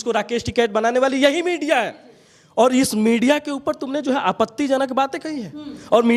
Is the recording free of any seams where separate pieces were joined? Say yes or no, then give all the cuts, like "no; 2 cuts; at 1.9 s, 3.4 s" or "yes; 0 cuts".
yes; 0 cuts